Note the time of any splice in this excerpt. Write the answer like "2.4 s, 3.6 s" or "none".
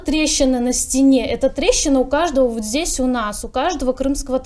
none